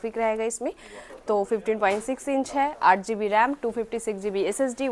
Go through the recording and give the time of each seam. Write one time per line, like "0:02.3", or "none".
none